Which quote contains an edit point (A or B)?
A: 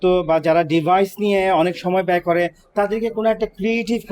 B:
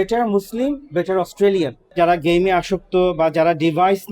B